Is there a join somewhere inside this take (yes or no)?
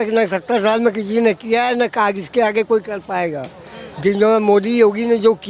no